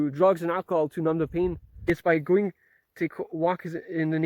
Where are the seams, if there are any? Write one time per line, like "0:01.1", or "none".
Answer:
0:01.9